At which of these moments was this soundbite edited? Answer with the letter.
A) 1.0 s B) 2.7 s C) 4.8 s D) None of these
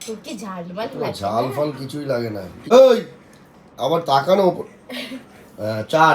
B